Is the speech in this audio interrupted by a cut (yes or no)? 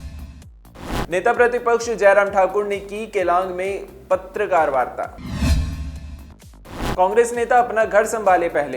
no